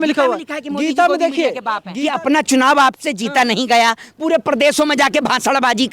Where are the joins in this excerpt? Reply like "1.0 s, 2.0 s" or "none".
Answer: 1.9 s